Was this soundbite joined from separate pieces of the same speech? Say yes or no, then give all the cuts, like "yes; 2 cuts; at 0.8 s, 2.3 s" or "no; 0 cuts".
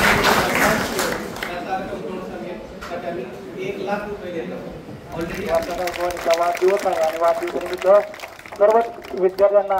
yes; 1 cut; at 5.4 s